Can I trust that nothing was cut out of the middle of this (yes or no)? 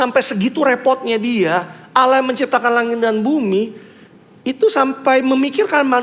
yes